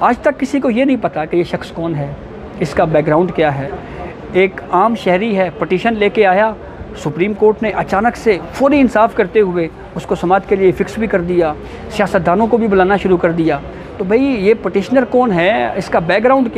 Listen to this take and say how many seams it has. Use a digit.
0